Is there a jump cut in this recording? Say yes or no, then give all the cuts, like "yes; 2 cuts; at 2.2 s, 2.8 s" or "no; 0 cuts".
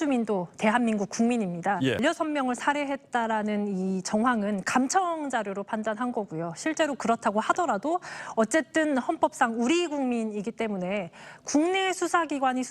yes; 1 cut; at 2.0 s